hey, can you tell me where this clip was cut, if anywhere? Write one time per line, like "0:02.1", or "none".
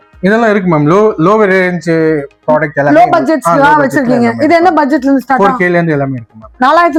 none